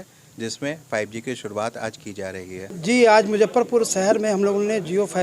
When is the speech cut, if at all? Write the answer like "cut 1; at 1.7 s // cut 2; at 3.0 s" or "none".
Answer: cut 1; at 2.7 s